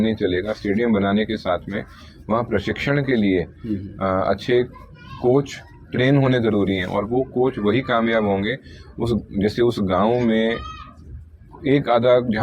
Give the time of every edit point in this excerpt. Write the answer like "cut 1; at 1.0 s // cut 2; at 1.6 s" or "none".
none

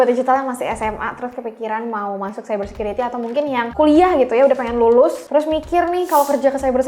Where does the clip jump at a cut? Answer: cut 1; at 3.7 s // cut 2; at 5.2 s

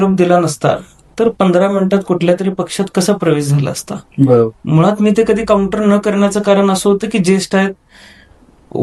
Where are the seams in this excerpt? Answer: none

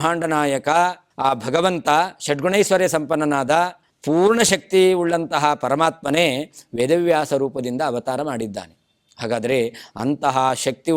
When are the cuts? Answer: cut 1; at 1.1 s // cut 2; at 3.9 s

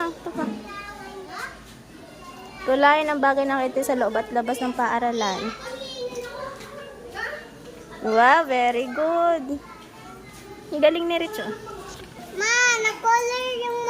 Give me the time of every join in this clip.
cut 1; at 12.2 s

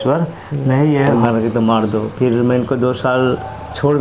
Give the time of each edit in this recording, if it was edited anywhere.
cut 1; at 1.1 s

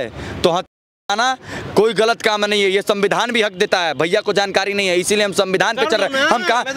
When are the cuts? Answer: none

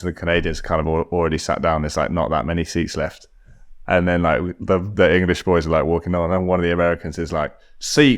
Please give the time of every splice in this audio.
none

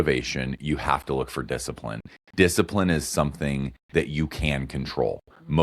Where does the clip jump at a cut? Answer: none

